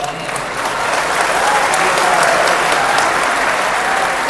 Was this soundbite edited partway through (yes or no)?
no